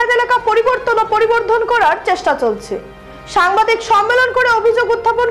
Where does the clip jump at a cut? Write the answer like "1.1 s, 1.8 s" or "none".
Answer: none